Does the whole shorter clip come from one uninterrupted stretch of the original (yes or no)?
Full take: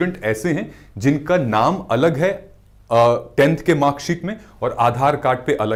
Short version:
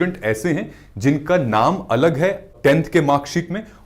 no